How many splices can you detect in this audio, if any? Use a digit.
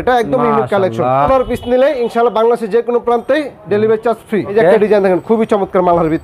2